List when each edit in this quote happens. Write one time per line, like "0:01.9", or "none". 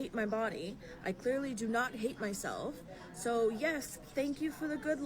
0:01.1
0:02.8